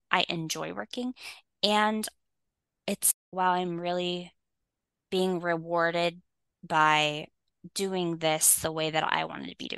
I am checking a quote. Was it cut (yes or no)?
no